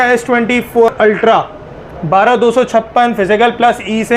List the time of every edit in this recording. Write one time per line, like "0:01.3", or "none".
0:00.9